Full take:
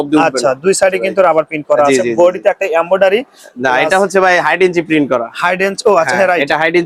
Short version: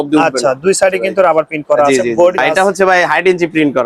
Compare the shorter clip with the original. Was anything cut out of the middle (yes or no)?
yes